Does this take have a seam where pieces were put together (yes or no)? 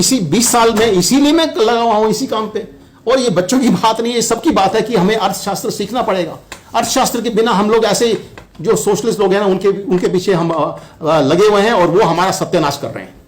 no